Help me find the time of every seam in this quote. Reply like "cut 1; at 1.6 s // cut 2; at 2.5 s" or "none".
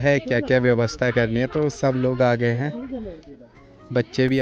none